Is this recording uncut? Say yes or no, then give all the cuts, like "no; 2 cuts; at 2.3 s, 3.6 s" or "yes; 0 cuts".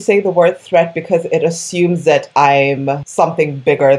no; 1 cut; at 3.0 s